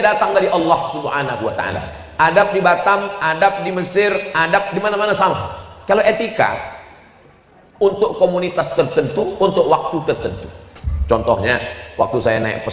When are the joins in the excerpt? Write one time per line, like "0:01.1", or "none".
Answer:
none